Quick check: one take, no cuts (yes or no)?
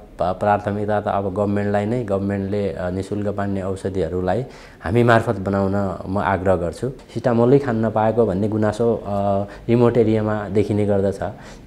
no